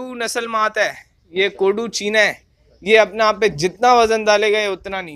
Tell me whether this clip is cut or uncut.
uncut